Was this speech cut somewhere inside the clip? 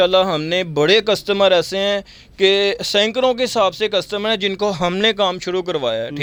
no; 0 cuts

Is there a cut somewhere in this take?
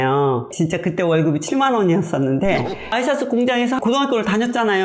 yes; 2 cuts; at 2.8 s, 3.8 s

